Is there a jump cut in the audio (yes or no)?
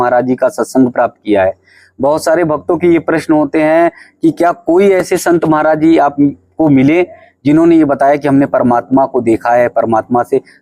no